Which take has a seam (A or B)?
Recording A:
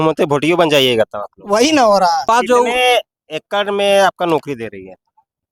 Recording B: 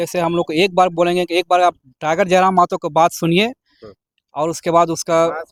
A